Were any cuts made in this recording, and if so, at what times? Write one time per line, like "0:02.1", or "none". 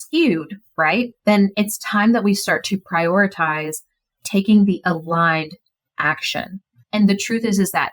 0:01.1